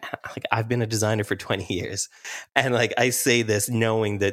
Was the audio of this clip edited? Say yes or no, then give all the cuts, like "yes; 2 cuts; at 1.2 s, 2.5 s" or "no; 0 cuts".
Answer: no; 0 cuts